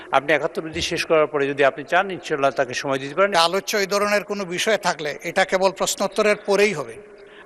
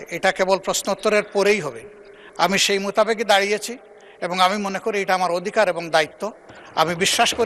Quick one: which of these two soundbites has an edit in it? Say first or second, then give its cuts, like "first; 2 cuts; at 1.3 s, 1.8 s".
first; 1 cut; at 3.3 s